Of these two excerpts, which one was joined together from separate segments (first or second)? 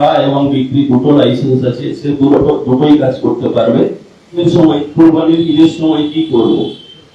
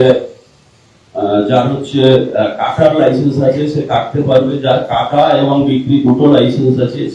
first